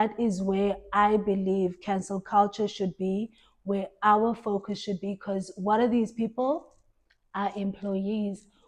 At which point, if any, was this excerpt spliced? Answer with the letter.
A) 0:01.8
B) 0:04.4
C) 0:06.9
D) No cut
D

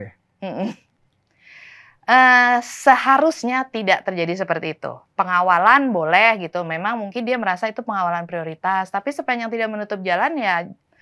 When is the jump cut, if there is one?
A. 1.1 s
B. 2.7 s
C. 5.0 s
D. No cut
D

